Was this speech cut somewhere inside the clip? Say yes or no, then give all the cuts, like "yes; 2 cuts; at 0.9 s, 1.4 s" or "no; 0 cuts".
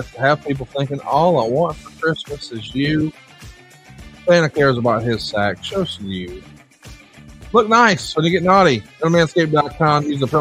no; 0 cuts